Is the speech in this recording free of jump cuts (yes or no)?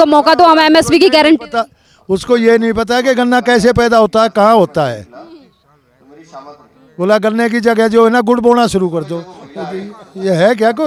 yes